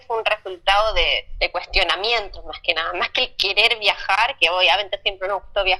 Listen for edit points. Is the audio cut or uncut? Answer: uncut